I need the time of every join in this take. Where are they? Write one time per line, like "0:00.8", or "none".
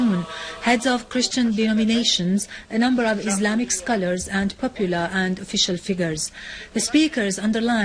0:04.0